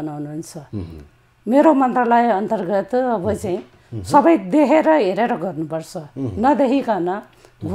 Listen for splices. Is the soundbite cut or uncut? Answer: uncut